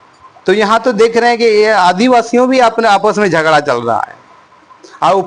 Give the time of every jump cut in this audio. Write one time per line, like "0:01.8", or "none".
none